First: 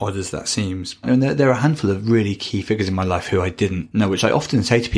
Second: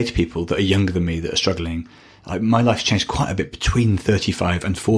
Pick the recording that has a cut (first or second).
first